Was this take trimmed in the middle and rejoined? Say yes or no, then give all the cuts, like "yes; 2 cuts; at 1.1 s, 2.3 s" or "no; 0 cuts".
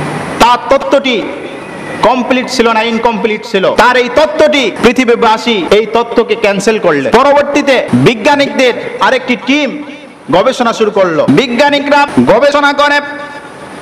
yes; 7 cuts; at 3.7 s, 4.8 s, 5.6 s, 7.1 s, 7.9 s, 11.3 s, 12.1 s